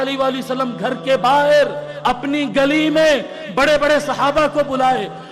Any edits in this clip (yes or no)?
no